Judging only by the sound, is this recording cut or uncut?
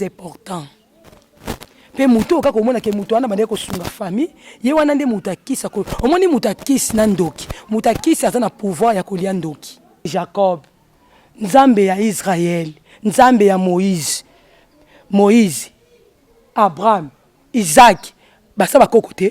cut